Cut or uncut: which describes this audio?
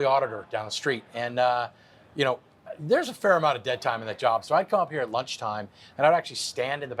uncut